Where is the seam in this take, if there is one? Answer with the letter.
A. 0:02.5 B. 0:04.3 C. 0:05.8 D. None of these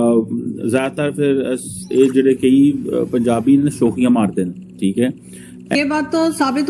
C